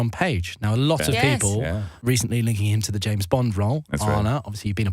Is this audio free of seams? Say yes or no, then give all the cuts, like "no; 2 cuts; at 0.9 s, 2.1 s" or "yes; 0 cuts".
no; 1 cut; at 1.9 s